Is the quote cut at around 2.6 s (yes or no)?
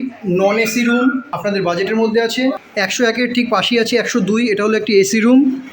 yes